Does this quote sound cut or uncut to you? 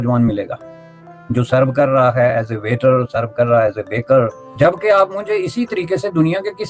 cut